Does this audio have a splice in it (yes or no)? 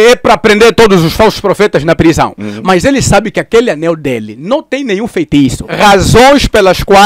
yes